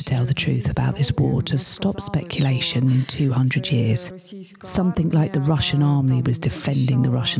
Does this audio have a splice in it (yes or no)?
no